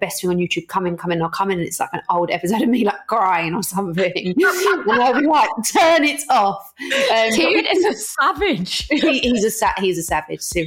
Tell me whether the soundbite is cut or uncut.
uncut